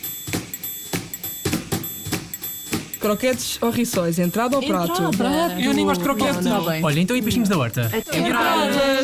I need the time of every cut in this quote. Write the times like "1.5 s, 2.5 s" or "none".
none